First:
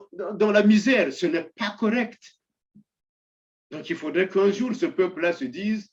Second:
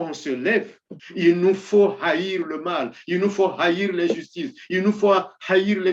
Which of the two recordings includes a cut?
second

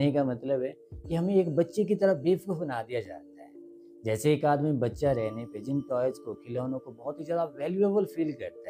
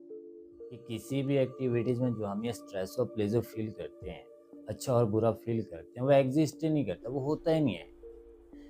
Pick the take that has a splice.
second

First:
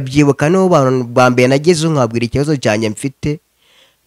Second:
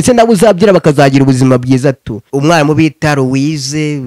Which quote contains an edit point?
second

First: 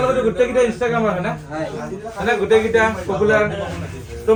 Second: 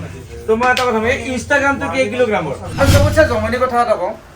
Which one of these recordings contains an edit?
second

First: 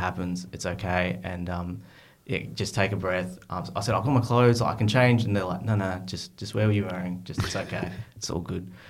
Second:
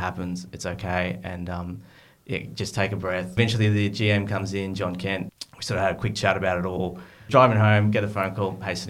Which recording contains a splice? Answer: second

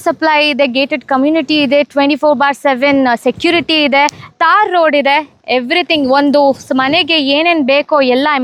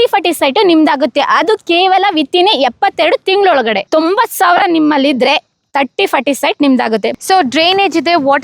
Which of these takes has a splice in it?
second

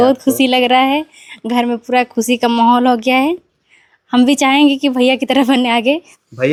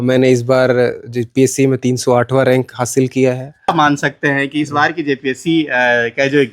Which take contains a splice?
second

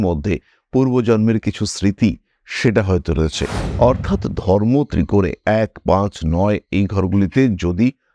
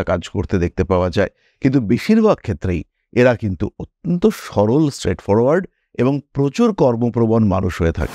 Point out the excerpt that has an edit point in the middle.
first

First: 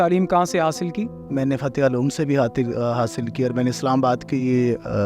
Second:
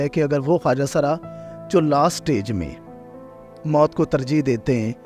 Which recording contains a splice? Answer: first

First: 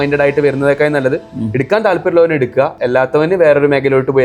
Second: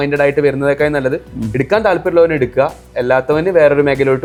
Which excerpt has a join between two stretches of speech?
first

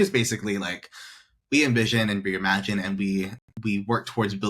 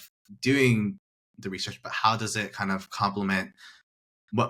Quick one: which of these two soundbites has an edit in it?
first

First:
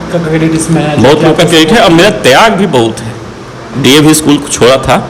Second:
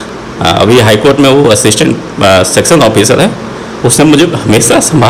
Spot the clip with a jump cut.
first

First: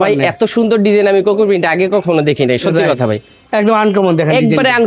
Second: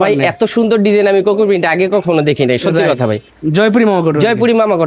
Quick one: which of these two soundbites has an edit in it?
second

